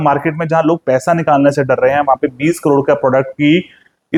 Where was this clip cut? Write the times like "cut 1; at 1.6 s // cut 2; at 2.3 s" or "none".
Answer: none